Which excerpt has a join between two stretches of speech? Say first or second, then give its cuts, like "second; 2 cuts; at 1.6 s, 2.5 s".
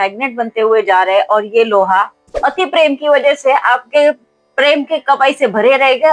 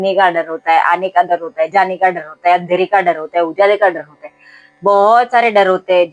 first; 1 cut; at 2.3 s